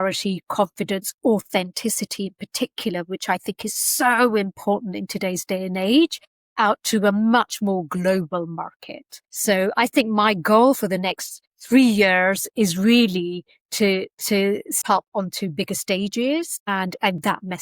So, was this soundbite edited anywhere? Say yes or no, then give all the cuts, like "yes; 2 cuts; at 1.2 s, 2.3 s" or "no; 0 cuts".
yes; 1 cut; at 16.6 s